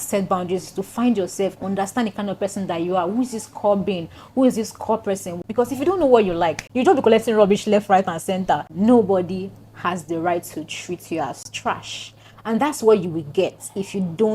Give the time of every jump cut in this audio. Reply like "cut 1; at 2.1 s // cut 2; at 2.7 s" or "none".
cut 1; at 5.4 s // cut 2; at 8.7 s // cut 3; at 11.5 s